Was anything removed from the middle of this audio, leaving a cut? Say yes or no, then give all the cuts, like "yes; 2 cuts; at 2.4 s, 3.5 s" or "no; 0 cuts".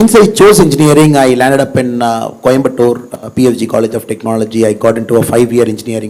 no; 0 cuts